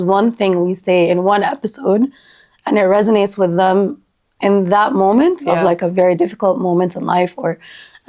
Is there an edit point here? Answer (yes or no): no